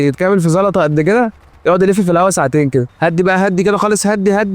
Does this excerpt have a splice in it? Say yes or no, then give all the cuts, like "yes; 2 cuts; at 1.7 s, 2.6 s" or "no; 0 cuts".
yes; 1 cut; at 2.9 s